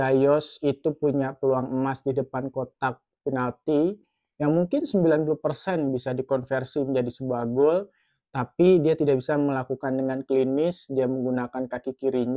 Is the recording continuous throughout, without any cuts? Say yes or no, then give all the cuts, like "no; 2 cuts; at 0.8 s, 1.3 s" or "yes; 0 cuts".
yes; 0 cuts